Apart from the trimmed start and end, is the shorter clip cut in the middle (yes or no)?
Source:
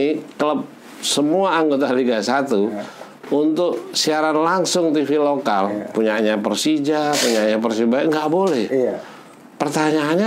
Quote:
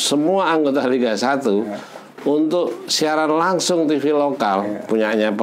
no